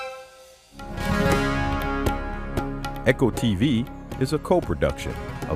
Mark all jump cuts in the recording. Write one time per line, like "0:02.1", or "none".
0:01.0